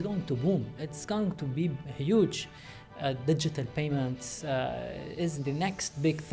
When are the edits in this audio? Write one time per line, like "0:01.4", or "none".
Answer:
none